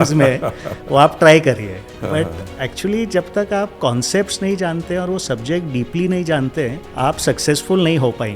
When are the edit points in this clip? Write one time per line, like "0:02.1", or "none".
0:06.8